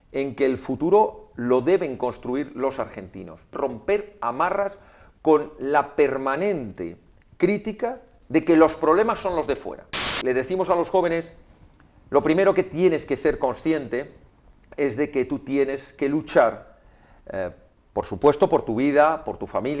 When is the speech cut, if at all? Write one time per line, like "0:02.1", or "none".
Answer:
0:03.5
0:10.1